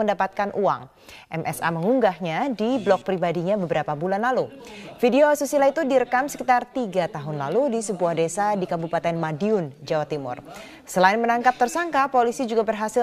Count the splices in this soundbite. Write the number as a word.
one